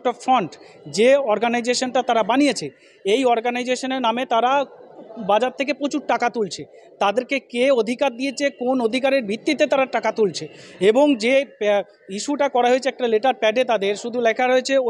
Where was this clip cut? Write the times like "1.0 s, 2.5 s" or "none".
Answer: 1.7 s